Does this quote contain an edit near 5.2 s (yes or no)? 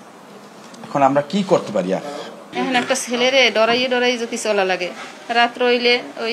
no